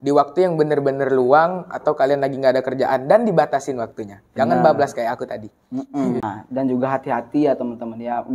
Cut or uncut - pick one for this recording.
cut